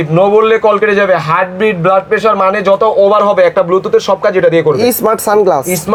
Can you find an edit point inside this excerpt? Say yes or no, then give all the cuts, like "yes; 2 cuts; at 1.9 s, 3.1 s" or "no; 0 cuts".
no; 0 cuts